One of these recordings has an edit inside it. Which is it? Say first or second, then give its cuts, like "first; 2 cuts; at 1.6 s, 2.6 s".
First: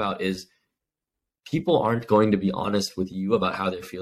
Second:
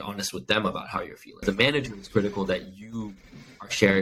second; 1 cut; at 1.4 s